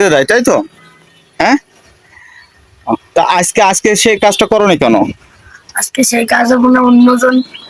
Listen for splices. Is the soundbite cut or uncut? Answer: uncut